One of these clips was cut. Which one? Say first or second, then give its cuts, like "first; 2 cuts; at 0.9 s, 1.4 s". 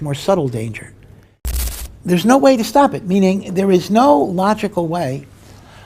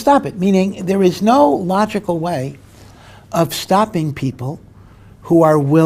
first; 1 cut; at 1.6 s